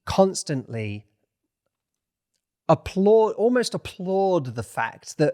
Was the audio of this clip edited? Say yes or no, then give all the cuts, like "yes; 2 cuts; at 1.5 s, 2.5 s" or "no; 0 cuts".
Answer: no; 0 cuts